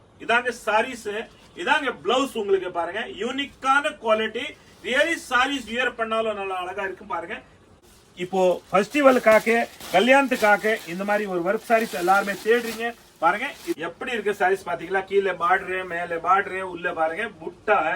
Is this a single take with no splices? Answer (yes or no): no